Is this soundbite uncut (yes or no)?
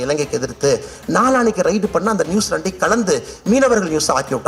yes